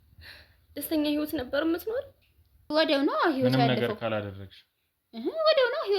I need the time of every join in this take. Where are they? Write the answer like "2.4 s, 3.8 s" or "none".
2.6 s